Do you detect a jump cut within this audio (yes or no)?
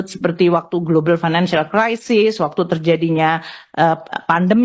no